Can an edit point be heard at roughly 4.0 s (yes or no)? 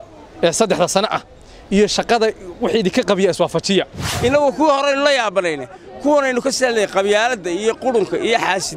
yes